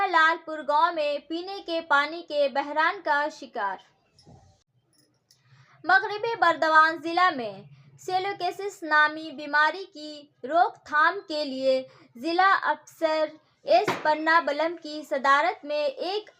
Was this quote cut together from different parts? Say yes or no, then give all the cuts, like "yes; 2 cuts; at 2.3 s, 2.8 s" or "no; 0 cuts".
yes; 1 cut; at 4.7 s